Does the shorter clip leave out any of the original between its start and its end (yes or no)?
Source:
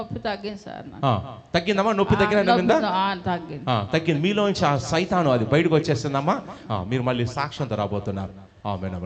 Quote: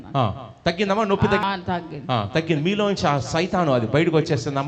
yes